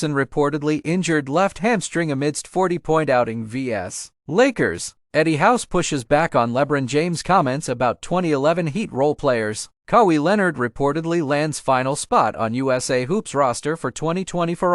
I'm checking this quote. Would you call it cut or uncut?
cut